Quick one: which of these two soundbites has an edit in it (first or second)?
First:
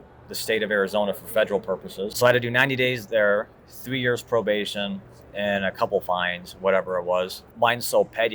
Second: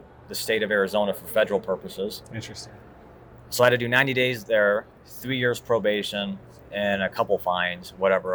first